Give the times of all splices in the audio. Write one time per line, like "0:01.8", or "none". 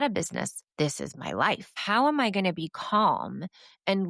0:01.8

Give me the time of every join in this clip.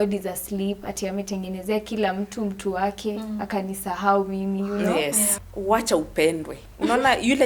0:05.3

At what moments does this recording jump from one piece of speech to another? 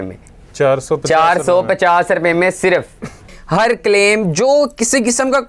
0:03.2

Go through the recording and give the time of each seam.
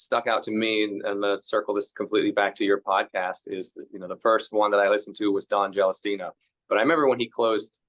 0:06.5

